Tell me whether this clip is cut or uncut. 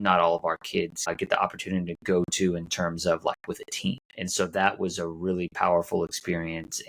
cut